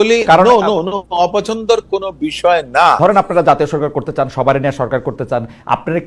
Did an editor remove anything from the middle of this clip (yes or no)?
yes